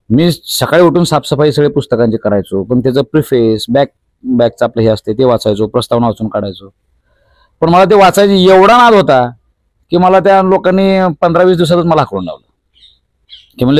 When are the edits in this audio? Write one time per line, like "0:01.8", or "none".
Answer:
none